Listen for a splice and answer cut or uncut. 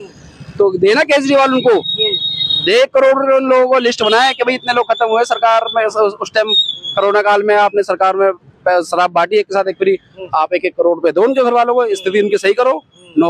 uncut